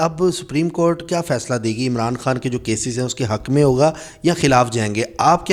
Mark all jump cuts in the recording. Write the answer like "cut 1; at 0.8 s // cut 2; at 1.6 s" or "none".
none